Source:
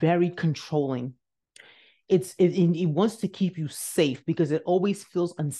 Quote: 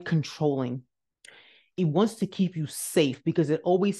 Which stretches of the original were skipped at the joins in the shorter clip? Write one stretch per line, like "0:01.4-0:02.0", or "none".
0:02.1-0:02.8